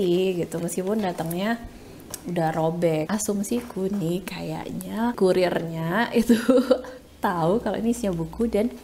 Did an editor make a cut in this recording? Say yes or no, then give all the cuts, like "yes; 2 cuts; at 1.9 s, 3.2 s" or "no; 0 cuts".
yes; 2 cuts; at 3.1 s, 5.2 s